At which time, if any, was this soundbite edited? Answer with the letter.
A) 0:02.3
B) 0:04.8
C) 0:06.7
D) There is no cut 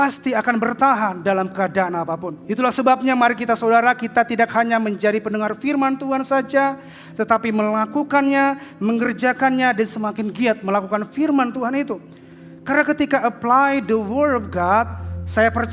A